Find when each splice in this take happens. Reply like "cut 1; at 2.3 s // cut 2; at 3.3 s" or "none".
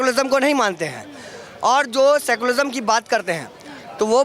none